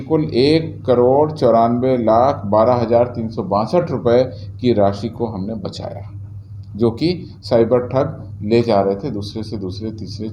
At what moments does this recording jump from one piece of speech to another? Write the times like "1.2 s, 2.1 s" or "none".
none